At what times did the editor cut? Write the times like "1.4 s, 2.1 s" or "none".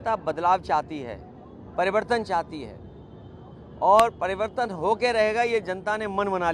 none